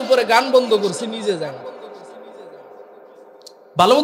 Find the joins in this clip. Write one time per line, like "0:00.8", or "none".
none